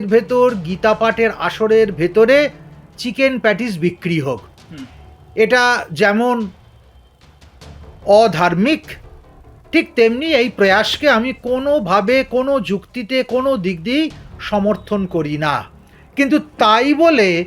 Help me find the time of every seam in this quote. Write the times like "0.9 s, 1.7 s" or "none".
none